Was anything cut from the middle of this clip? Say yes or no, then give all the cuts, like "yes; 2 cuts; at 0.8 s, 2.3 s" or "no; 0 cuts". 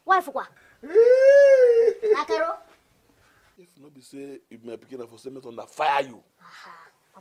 no; 0 cuts